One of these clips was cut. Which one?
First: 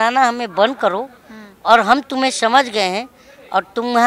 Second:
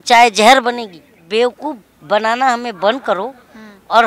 second; 1 cut; at 1.2 s

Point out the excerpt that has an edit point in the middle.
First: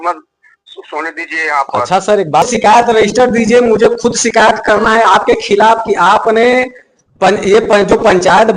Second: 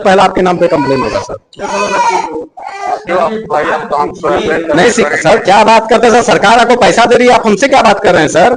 first; 1 cut; at 2.4 s

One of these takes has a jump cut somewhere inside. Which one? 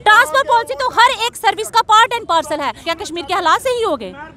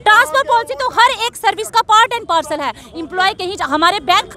first; 1 cut; at 2.9 s

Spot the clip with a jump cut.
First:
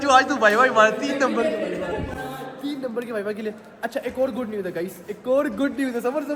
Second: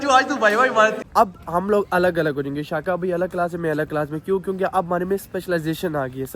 second; 1 cut; at 1.0 s

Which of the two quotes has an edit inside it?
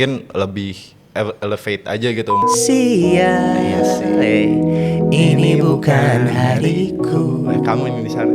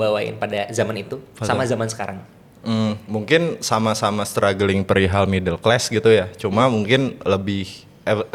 first; 1 cut; at 2.4 s

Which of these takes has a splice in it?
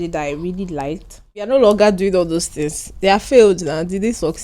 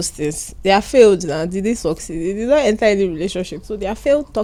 first; 1 cut; at 1.5 s

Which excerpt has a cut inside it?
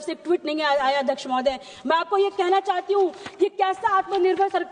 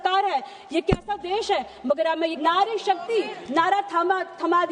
second; 1 cut; at 2.4 s

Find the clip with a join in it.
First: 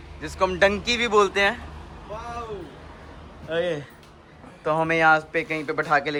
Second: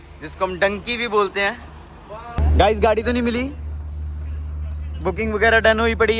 second; 1 cut; at 2.4 s

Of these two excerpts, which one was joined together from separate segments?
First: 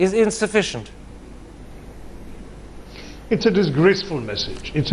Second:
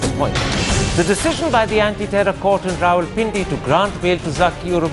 first; 1 cut; at 3.0 s

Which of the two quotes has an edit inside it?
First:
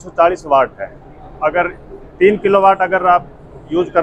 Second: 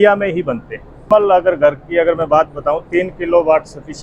second; 1 cut; at 1.0 s

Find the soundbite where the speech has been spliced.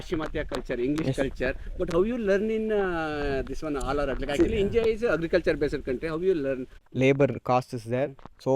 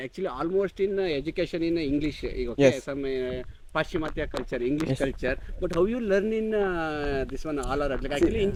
first; 1 cut; at 6.8 s

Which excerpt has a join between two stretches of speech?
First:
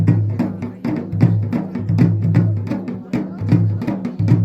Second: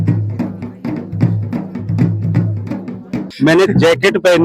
second; 1 cut; at 3.2 s

